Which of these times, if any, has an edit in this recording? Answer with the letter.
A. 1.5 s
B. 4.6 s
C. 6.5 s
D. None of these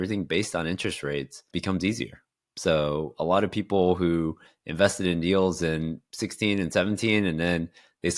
A